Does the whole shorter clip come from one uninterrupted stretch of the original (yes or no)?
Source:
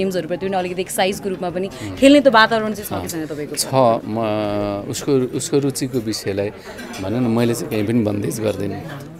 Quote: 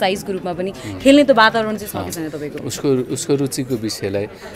no